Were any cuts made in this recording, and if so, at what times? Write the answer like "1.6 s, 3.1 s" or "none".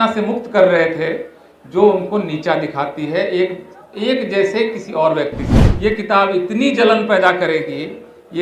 5.6 s

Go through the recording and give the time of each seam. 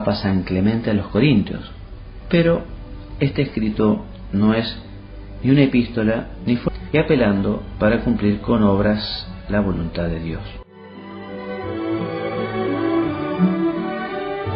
none

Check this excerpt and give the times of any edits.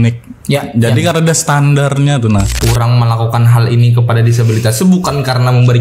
2.5 s

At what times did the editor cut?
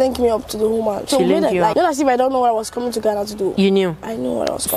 1.0 s, 1.7 s, 3.5 s

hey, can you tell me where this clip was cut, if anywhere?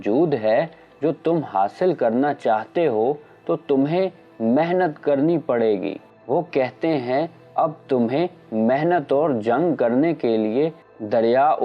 6.1 s

